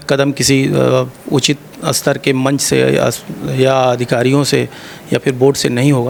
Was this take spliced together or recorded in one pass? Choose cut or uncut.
uncut